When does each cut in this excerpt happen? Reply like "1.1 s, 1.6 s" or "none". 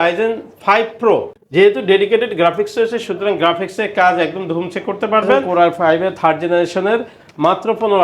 1.4 s, 5.5 s